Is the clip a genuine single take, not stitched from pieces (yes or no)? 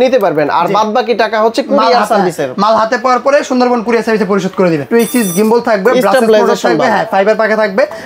no